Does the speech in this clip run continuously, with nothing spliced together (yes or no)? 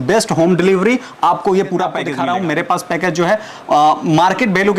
no